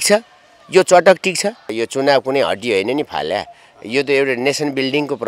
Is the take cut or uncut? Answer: cut